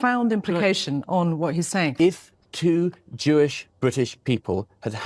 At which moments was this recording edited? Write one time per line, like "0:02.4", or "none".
0:01.9